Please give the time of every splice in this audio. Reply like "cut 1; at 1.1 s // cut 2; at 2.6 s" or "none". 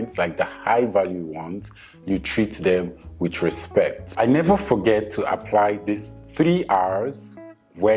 none